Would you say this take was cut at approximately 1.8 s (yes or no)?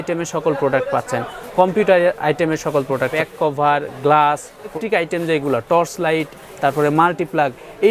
no